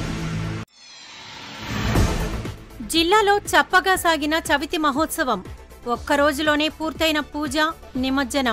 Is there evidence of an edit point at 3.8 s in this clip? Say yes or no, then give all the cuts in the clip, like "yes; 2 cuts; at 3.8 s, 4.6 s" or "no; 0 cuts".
no; 1 cut; at 2.1 s